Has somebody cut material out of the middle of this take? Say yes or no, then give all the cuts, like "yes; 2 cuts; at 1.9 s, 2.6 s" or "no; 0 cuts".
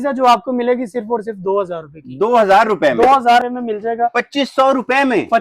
yes; 1 cut; at 3.5 s